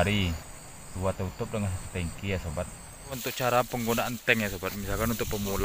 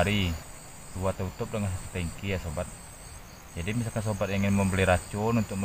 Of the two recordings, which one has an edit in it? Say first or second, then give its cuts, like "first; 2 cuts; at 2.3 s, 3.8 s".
first; 1 cut; at 3.3 s